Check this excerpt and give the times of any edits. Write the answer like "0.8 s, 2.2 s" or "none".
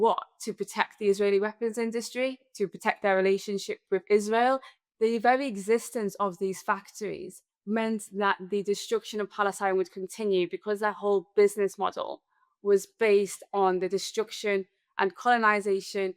4.8 s